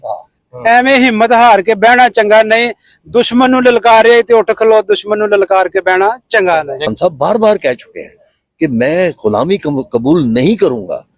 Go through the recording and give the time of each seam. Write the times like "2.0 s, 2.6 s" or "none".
6.8 s